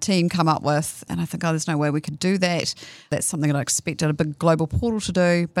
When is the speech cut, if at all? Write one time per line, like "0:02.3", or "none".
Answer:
0:01.1
0:03.1